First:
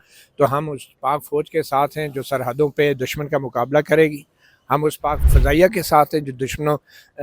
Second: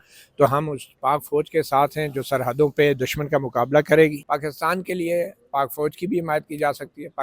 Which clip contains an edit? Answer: second; 1 cut; at 4.2 s

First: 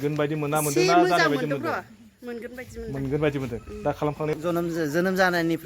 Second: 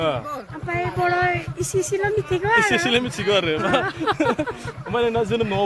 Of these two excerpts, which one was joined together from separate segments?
first; 1 cut; at 4.4 s

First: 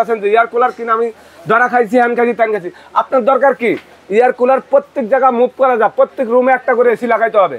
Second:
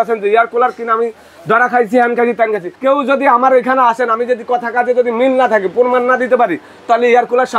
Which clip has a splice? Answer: second; 1 cut; at 2.7 s

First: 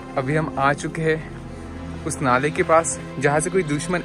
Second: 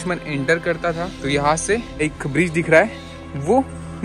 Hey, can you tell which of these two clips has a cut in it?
second; 2 cuts; at 1.2 s, 2.0 s

